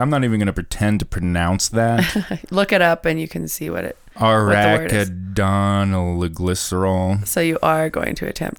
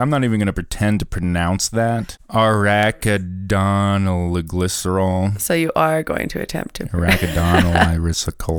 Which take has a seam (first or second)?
second